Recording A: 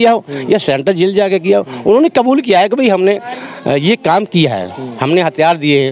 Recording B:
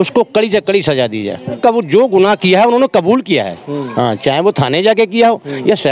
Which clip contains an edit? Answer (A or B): B